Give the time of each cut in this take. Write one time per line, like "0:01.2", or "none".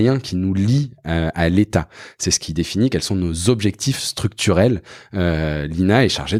none